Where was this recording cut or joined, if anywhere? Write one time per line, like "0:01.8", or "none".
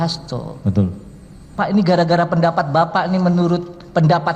0:01.5